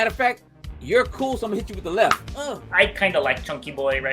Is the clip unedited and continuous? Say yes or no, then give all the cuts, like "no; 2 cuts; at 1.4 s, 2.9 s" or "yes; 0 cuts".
no; 1 cut; at 2.3 s